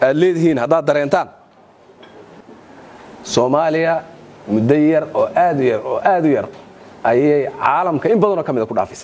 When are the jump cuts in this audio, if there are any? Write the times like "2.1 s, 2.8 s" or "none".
none